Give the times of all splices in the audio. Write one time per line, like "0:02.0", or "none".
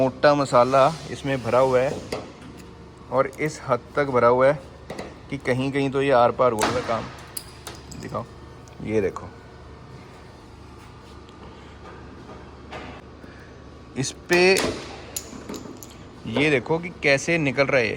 none